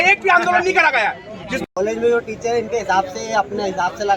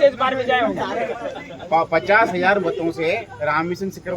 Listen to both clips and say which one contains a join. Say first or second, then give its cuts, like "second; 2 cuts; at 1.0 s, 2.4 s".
first; 1 cut; at 1.6 s